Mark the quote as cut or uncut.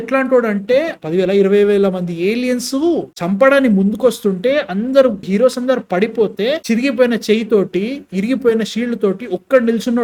uncut